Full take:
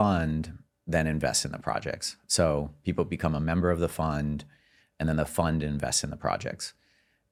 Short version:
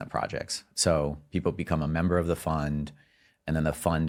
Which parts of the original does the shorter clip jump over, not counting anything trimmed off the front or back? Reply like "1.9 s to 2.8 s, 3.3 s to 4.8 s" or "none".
none